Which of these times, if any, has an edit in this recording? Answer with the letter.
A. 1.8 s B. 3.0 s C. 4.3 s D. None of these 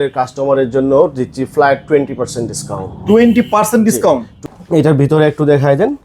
C